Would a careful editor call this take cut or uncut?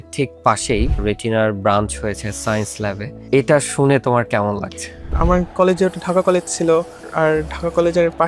cut